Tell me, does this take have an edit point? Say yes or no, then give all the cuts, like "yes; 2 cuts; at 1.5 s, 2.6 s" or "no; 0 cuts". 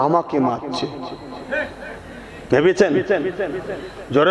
no; 0 cuts